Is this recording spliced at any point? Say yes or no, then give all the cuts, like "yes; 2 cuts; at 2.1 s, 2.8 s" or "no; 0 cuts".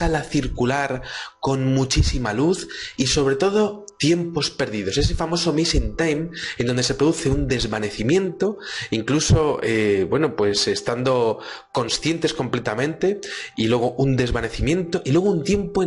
no; 0 cuts